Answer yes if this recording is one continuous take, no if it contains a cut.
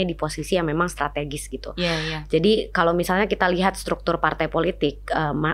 yes